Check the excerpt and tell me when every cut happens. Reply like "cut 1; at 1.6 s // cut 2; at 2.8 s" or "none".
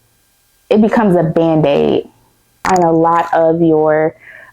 cut 1; at 2.6 s